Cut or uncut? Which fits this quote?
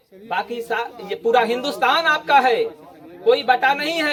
uncut